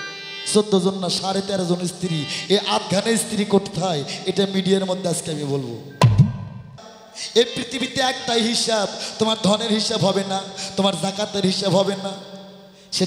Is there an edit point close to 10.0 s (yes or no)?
no